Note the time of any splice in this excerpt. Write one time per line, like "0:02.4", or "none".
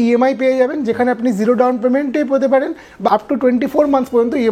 0:03.1